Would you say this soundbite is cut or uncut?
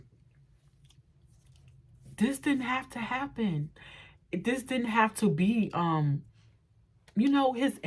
uncut